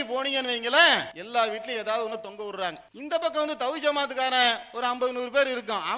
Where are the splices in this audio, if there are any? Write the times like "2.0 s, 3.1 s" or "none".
1.2 s, 2.9 s